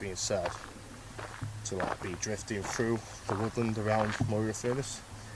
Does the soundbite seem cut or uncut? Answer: uncut